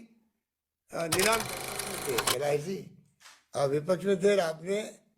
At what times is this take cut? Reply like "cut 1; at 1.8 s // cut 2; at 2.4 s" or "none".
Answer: cut 1; at 1.9 s